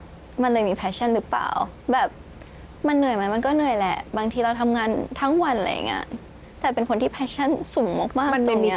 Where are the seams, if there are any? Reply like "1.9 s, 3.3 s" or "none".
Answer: none